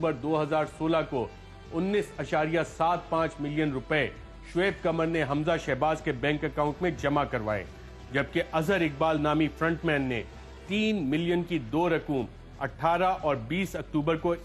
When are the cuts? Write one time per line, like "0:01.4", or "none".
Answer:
none